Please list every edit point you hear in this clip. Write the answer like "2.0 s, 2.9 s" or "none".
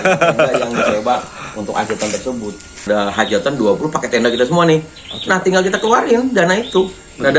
2.8 s

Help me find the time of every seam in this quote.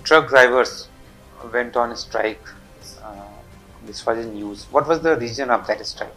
none

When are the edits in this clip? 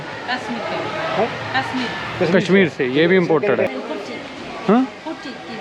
3.7 s

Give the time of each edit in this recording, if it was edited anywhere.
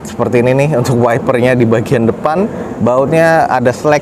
none

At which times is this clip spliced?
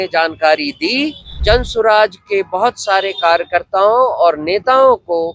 1.4 s

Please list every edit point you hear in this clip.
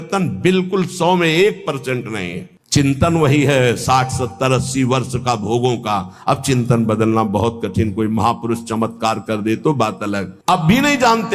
2.4 s, 10.3 s

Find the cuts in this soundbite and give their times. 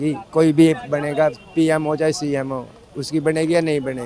none

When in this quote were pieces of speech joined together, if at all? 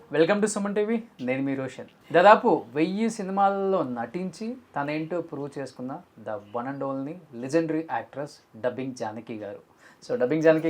1.9 s

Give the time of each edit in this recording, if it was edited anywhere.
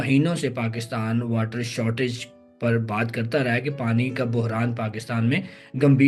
none

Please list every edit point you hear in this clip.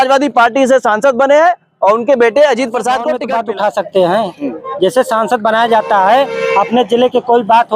3.2 s

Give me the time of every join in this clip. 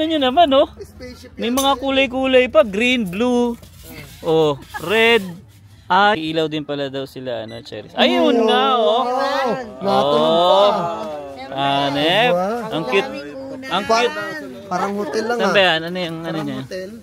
6.1 s

